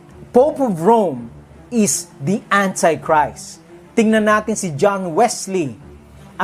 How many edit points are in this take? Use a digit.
0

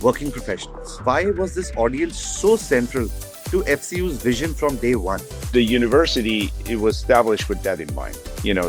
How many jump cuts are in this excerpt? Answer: 2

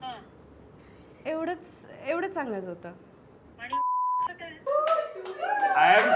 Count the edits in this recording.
1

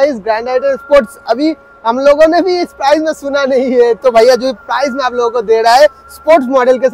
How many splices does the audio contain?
0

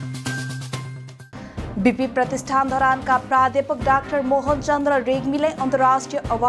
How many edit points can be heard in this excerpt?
1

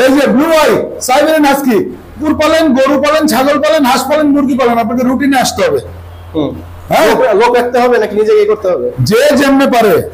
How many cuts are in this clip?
1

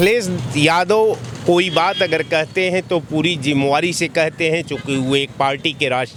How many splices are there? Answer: 0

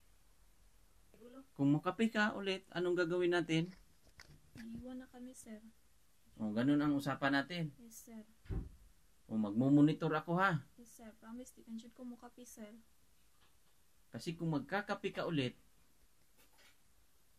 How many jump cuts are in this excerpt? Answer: 1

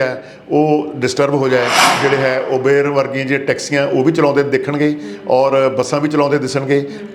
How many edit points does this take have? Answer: 1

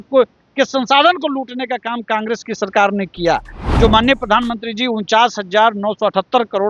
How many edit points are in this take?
1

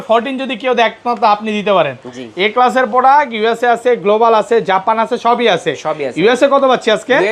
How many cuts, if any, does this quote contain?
0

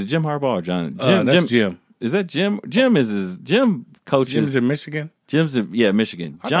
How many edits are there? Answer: 0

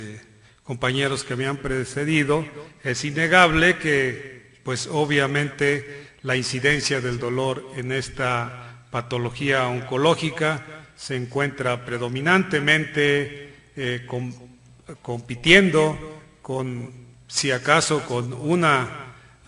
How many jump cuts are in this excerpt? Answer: 0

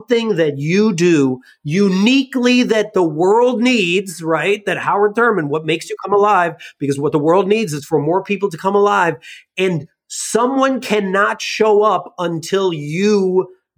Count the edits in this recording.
0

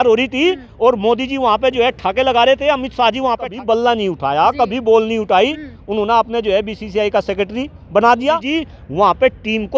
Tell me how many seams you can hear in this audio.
2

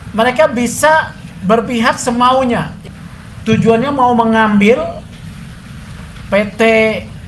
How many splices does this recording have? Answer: 1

